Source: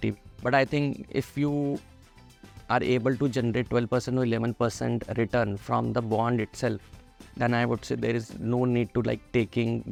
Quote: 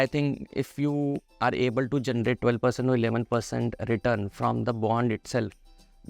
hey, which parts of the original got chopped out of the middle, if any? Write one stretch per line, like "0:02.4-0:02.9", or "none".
0:01.9-0:02.6